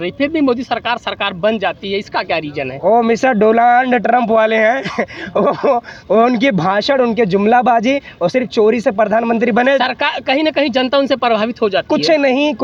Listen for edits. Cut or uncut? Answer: uncut